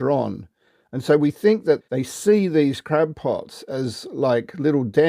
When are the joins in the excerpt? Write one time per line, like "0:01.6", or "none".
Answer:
0:01.8